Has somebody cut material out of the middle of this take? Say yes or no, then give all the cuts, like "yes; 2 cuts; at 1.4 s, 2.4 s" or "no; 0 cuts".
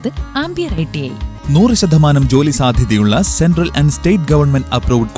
yes; 1 cut; at 1.3 s